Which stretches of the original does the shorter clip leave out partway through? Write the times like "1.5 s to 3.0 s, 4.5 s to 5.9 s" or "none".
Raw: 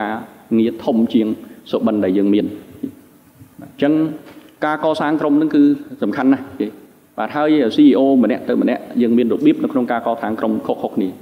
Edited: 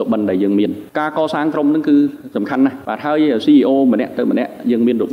2.6 s to 4.5 s, 6.5 s to 7.1 s